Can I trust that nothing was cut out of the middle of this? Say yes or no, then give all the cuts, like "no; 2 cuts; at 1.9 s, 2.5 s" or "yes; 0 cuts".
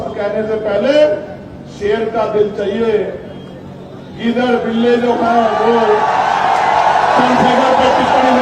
yes; 0 cuts